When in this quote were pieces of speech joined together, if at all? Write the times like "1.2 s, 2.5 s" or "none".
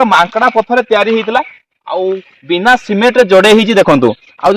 none